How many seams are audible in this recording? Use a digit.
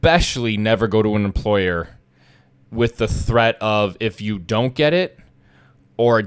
0